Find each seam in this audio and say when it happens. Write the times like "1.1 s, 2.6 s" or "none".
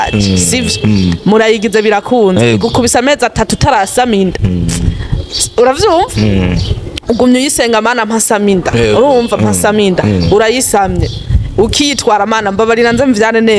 none